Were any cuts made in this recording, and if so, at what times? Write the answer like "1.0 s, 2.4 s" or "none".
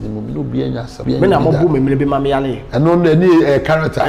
0.9 s